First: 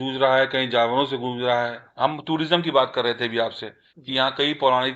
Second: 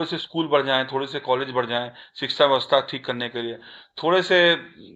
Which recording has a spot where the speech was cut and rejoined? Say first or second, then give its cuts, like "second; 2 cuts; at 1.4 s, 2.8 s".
first; 1 cut; at 1.8 s